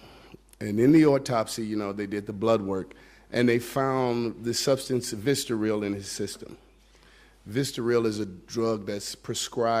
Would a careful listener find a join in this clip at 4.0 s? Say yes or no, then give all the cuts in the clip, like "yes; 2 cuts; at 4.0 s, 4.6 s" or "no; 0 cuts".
yes; 1 cut; at 4.0 s